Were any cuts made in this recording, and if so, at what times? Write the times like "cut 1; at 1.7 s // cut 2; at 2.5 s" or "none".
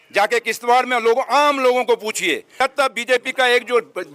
cut 1; at 2.6 s